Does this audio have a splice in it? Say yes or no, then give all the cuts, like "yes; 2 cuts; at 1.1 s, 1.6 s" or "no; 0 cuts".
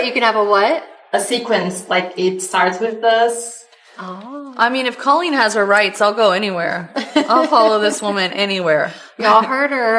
no; 0 cuts